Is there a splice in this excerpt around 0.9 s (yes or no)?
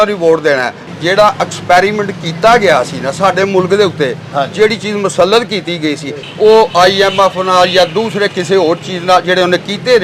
yes